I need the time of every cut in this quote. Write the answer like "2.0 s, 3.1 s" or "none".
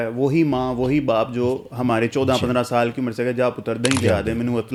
none